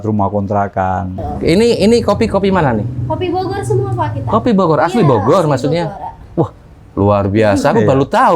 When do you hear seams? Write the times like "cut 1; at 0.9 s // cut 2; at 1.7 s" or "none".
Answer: cut 1; at 1.1 s